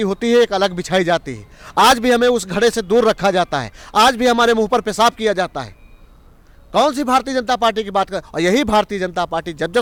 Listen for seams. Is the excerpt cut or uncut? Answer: uncut